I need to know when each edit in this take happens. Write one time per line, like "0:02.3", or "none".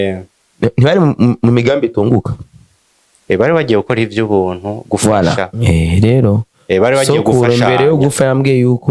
none